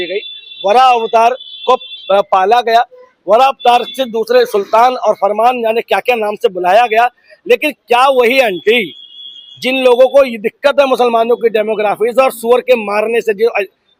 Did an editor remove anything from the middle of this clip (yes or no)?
no